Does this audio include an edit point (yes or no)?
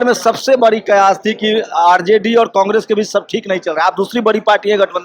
no